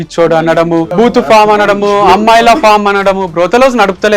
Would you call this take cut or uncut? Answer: cut